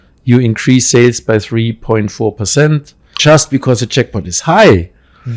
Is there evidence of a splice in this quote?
yes; 1 cut; at 3.2 s

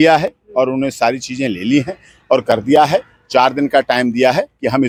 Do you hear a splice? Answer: no; 0 cuts

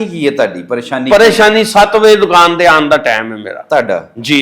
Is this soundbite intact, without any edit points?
yes; 0 cuts

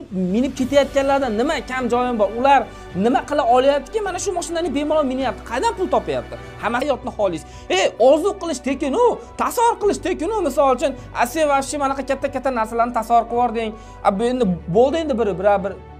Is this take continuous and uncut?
no; 1 cut; at 6.8 s

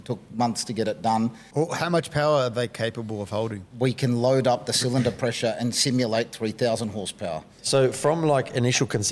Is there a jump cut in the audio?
yes; 3 cuts; at 1.4 s, 3.6 s, 7.6 s

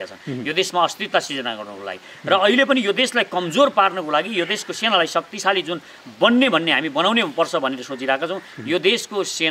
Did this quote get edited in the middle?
no; 0 cuts

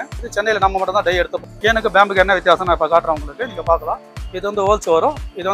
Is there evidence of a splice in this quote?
yes; 1 cut; at 1.4 s

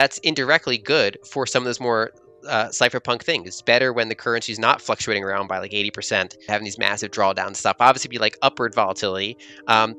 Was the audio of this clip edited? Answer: yes; 1 cut; at 6.5 s

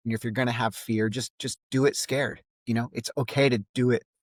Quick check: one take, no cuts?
yes; 0 cuts

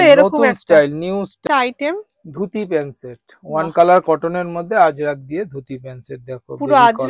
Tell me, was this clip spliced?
yes; 1 cut; at 1.4 s

